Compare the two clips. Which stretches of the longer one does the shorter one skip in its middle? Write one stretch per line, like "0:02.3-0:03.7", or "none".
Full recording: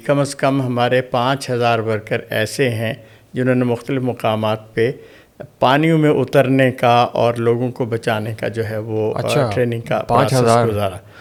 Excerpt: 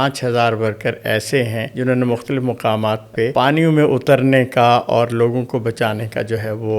0:02.9-0:03.2
0:04.9-0:05.6